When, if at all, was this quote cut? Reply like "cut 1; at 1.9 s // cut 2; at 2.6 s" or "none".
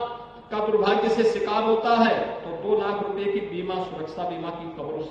none